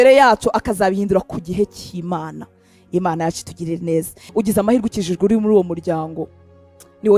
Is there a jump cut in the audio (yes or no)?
yes